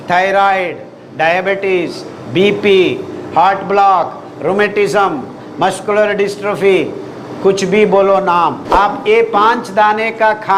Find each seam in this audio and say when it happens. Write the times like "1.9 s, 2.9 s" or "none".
8.6 s